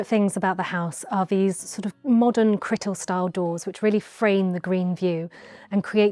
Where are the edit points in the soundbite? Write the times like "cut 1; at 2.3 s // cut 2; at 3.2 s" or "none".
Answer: none